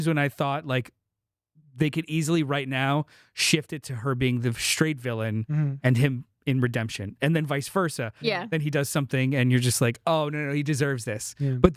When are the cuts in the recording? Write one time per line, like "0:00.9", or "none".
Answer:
none